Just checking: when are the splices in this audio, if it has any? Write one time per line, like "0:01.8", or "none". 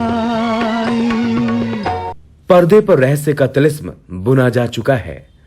0:02.3